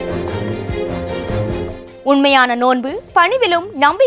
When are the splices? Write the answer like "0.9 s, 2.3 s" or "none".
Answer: 1.9 s